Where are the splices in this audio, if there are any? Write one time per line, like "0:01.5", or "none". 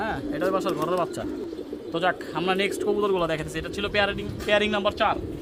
none